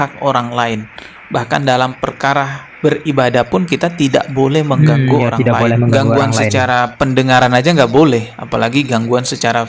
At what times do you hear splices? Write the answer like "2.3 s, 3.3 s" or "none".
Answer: none